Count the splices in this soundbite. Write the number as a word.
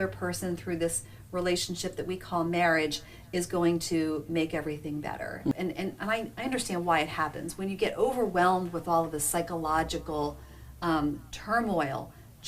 one